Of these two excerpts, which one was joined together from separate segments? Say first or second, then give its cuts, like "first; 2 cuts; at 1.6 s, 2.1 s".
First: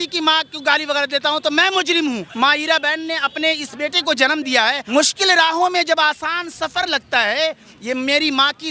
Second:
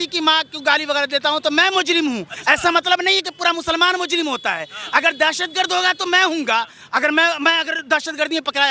first; 2 cuts; at 2.3 s, 4.8 s